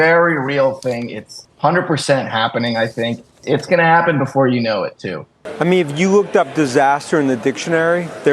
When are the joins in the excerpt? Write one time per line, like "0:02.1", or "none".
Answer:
0:05.4